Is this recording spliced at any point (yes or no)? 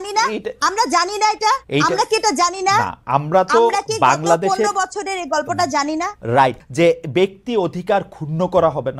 yes